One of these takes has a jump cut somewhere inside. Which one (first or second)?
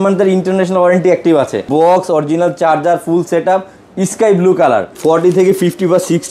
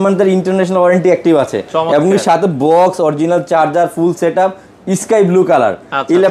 first